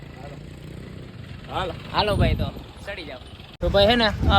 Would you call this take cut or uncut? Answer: cut